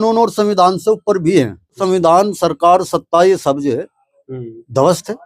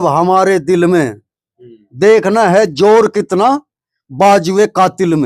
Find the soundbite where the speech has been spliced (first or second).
first